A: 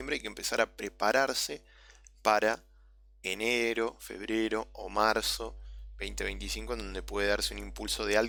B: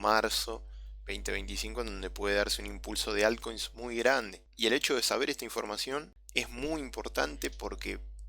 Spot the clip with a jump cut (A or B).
B